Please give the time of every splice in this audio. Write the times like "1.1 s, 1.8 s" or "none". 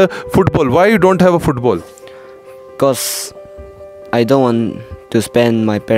none